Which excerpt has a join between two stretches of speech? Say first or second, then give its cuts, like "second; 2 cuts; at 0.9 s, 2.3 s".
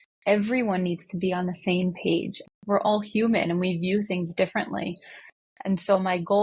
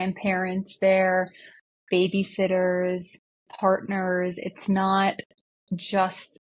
first; 1 cut; at 2.4 s